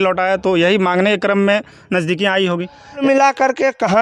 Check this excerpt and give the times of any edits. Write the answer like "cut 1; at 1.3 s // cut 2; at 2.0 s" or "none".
cut 1; at 3.0 s